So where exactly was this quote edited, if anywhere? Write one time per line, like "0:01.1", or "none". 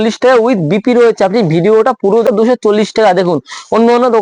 0:02.3